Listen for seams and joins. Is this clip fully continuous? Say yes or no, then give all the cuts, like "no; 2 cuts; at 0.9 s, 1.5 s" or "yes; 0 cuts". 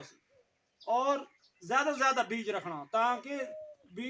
yes; 0 cuts